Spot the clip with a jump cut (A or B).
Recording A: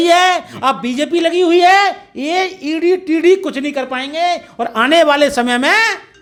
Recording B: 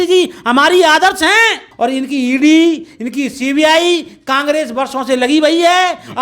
B